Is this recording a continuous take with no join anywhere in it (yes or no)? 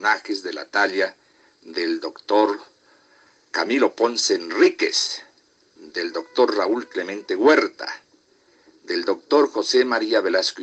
no